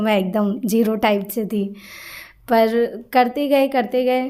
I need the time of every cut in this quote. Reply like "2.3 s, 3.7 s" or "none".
none